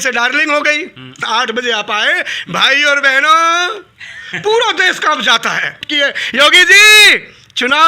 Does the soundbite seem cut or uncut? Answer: cut